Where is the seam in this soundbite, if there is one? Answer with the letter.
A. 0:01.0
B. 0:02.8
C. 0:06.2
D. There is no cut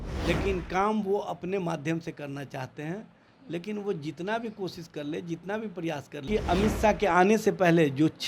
C